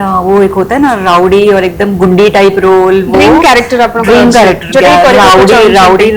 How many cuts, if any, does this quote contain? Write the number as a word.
zero